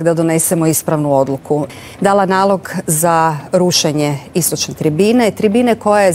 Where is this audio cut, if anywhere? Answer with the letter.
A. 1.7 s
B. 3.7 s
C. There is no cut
A